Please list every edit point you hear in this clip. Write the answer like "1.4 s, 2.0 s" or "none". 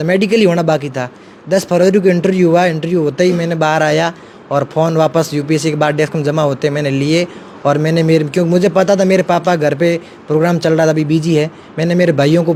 none